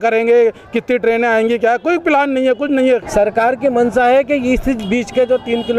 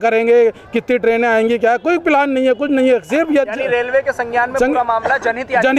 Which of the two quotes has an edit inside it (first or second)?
first